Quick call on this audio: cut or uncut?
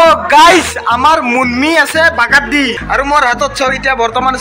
cut